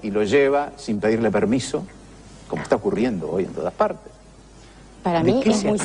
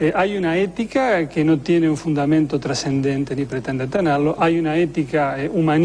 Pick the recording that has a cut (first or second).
first